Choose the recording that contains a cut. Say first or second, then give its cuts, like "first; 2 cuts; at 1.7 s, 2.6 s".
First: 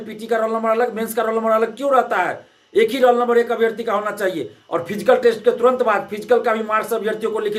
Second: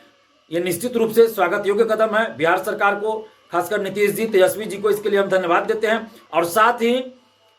second; 1 cut; at 6.2 s